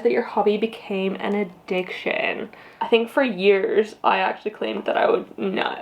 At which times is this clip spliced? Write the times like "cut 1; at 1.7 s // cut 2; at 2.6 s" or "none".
cut 1; at 2.7 s